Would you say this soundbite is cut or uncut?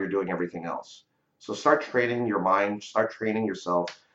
uncut